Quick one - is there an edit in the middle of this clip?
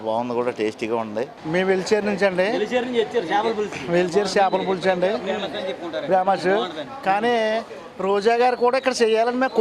yes; 1 cut; at 1.4 s

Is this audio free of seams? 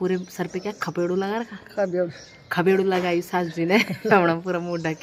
yes; 0 cuts

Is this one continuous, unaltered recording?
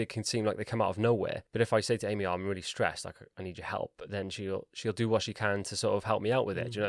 no; 1 cut; at 1.4 s

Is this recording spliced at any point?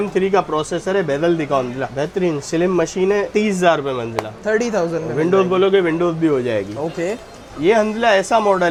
no; 0 cuts

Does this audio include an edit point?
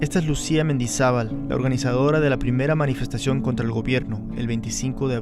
yes; 1 cut; at 0.9 s

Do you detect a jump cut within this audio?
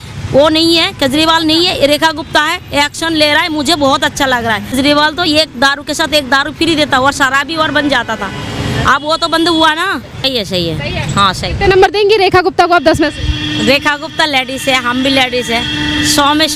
yes; 2 cuts; at 4.7 s, 10.2 s

